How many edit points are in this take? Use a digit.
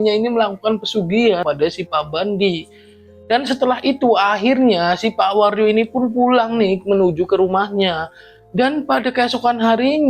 1